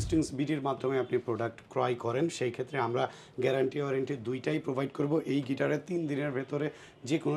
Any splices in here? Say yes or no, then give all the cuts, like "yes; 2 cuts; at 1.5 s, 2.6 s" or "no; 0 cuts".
no; 0 cuts